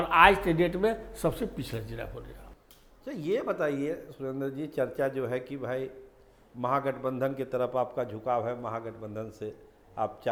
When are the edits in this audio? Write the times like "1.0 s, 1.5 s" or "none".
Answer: none